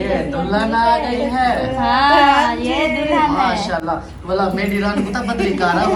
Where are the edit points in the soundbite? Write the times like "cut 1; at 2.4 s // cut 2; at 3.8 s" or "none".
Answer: none